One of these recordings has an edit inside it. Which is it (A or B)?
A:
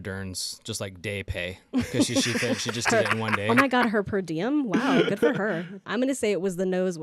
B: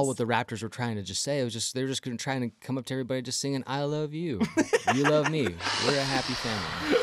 A